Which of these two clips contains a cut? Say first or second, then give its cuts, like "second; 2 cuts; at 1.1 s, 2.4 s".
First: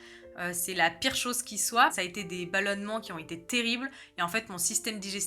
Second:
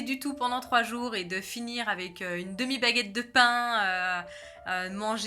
first; 1 cut; at 1.9 s